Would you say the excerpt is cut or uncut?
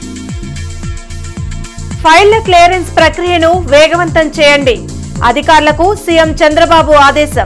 uncut